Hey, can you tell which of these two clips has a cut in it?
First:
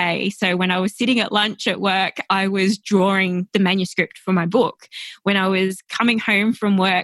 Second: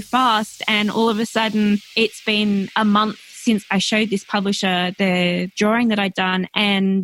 second; 3 cuts; at 1.9 s, 3.6 s, 5.5 s

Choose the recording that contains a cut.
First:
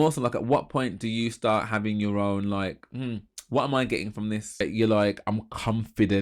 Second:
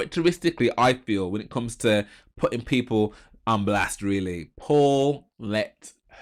first; 1 cut; at 4.6 s

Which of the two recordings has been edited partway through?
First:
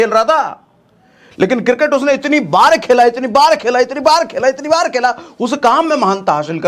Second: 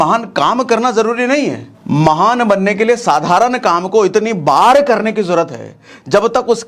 second; 1 cut; at 1.7 s

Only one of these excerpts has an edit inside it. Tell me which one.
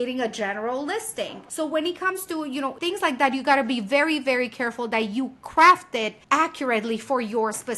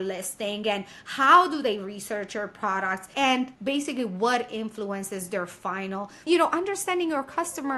second; 1 cut; at 6.2 s

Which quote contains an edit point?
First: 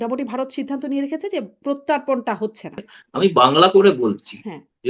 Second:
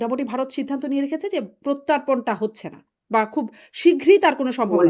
first; 1 cut; at 2.9 s

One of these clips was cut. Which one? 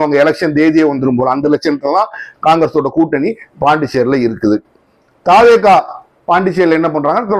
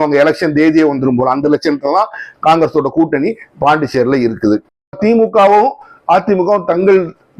second; 1 cut; at 5.0 s

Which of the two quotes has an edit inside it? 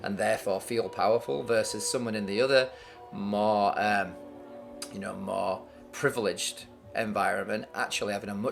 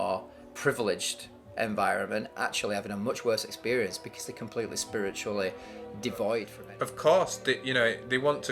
second; 1 cut; at 6.6 s

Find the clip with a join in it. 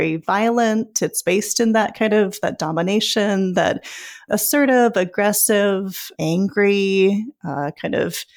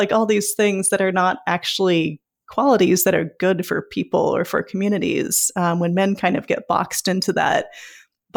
first; 2 cuts; at 4.2 s, 6.1 s

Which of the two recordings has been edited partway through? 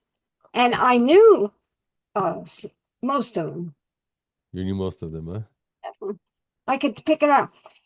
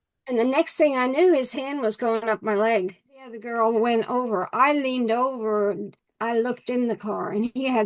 second; 1 cut; at 3.4 s

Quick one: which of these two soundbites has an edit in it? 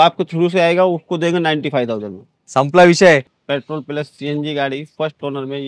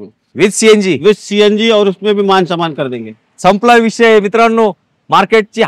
first; 1 cut; at 3.3 s

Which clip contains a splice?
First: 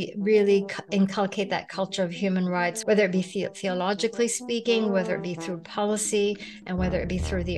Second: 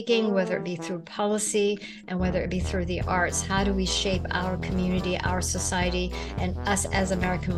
first; 1 cut; at 2.8 s

